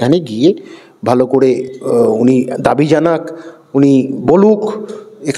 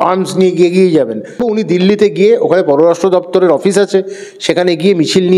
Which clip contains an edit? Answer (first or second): second